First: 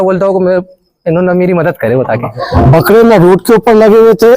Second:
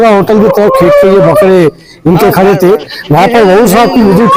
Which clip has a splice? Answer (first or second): first